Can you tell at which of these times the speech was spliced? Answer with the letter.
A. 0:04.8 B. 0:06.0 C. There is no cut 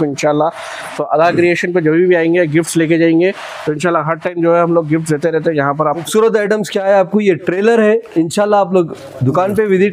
B